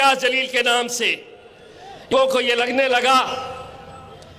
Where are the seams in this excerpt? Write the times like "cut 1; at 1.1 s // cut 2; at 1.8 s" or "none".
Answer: cut 1; at 2.1 s